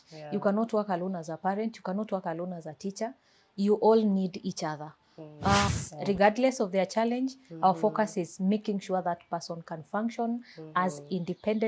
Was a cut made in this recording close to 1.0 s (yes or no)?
no